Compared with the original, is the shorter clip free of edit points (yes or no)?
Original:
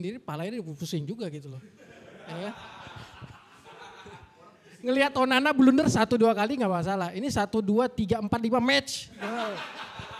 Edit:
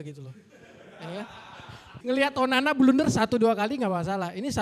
no